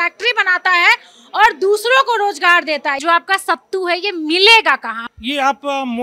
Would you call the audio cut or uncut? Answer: cut